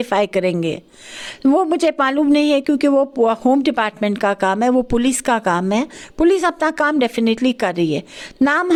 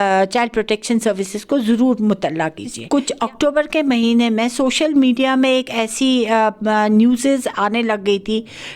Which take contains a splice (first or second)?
second